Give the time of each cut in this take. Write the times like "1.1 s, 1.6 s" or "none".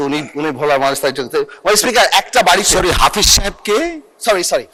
none